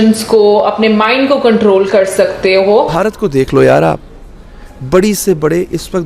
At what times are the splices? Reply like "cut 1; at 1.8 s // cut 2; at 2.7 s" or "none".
cut 1; at 2.9 s

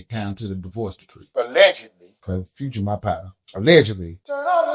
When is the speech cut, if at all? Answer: none

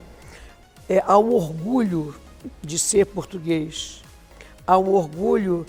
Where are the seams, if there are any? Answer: none

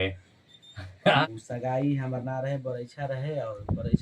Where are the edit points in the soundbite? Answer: cut 1; at 1.2 s

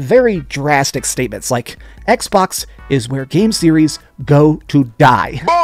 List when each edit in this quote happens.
none

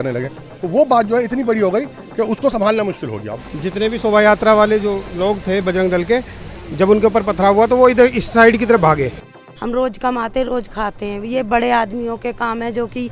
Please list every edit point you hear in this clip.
cut 1; at 3.3 s // cut 2; at 5.1 s // cut 3; at 9.3 s

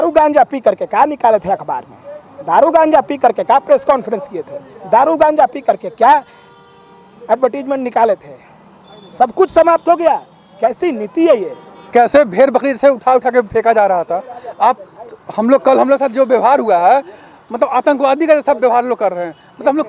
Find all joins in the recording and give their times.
cut 1; at 11.7 s

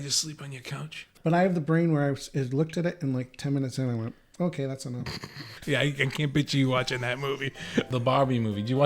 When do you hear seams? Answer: cut 1; at 1.1 s // cut 2; at 5.5 s // cut 3; at 7.9 s

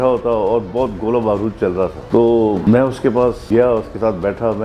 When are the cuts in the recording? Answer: cut 1; at 2.0 s // cut 2; at 2.6 s // cut 3; at 3.4 s

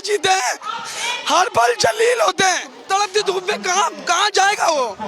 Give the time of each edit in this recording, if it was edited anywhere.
cut 1; at 2.7 s

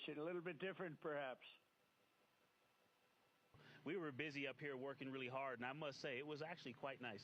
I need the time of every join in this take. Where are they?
cut 1; at 3.7 s

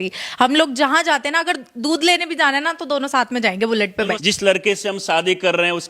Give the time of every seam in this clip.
cut 1; at 4.2 s

